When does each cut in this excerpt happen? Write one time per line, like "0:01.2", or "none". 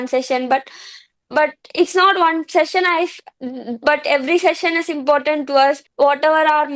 0:05.9